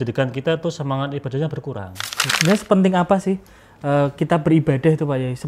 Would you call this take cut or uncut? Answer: cut